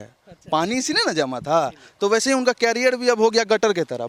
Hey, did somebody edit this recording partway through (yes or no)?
no